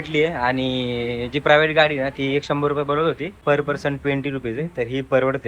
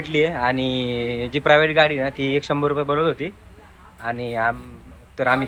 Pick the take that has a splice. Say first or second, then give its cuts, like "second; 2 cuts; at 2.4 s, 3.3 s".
first; 1 cut; at 3.3 s